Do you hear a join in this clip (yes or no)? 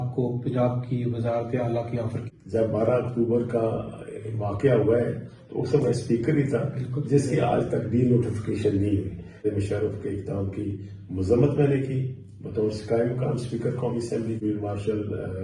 yes